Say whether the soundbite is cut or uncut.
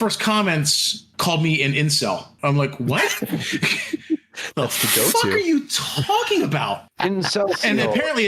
cut